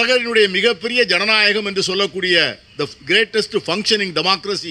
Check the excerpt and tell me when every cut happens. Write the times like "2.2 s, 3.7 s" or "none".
none